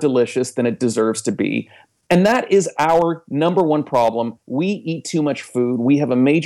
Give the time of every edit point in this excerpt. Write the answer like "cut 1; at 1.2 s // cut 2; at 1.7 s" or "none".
cut 1; at 4.4 s